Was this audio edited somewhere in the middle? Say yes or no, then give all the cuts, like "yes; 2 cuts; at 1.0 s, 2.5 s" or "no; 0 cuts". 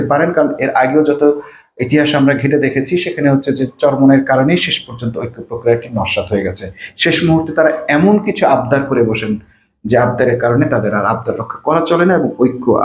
no; 0 cuts